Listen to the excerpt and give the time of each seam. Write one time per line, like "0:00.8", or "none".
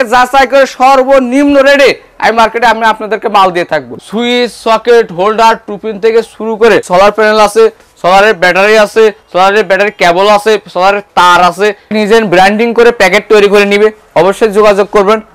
0:03.9
0:06.8
0:11.9

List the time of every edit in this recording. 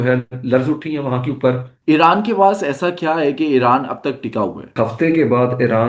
0:01.7
0:04.7

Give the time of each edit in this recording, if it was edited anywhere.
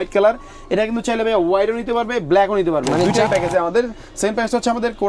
0:03.3

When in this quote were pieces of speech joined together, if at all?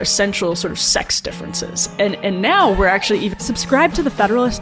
0:03.4

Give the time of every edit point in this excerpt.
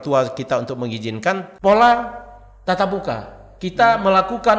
0:01.5

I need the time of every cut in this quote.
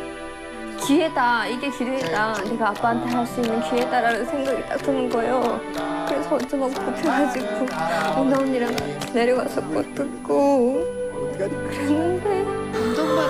none

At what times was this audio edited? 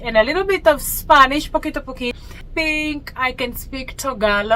0:02.1

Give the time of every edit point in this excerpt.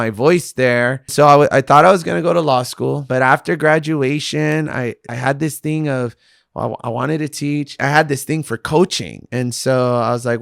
0:01.1
0:03.0
0:05.1
0:07.8

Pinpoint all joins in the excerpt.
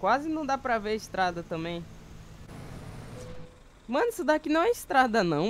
0:02.5

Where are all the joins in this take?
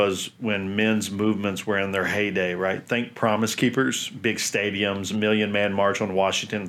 none

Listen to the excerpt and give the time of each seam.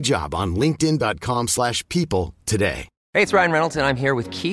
0:02.9

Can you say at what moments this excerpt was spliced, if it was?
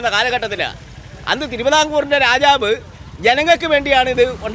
none

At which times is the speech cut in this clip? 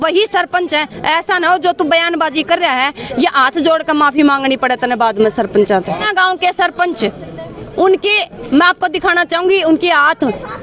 0:06.0

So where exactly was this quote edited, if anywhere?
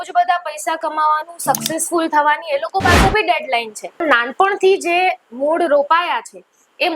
0:04.0

